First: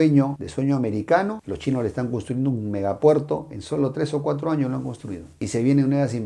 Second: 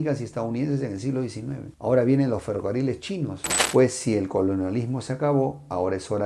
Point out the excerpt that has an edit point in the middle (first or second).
second